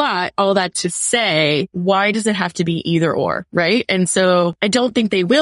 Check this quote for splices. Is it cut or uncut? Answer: cut